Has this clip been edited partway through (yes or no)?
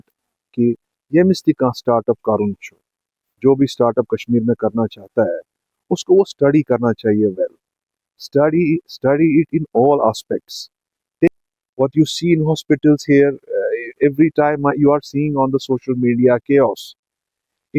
yes